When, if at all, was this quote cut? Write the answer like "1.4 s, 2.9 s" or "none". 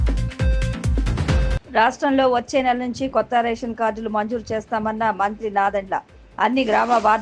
1.2 s